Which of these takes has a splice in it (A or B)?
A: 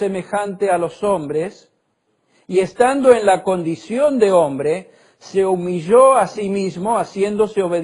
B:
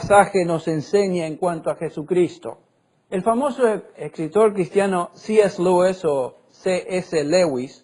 B